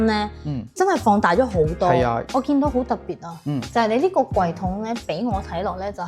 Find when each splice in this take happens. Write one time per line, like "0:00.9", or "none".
0:02.2